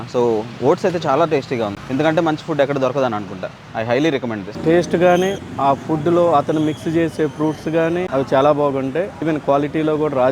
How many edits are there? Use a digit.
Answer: 3